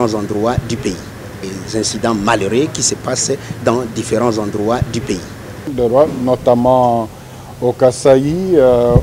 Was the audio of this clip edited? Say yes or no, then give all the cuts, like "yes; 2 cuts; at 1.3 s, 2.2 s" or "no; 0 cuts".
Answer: yes; 2 cuts; at 1.4 s, 5.6 s